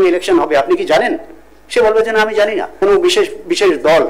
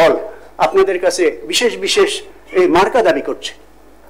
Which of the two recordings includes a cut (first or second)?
first